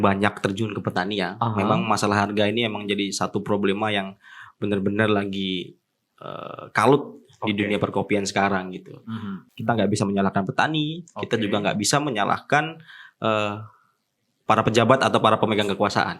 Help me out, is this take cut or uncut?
cut